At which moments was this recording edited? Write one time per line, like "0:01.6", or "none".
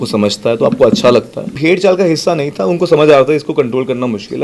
0:01.5